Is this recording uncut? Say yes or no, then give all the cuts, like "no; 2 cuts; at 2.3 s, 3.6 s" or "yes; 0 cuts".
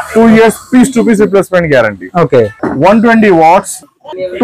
yes; 0 cuts